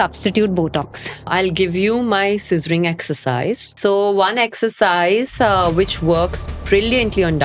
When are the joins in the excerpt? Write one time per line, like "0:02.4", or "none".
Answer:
0:01.3
0:03.8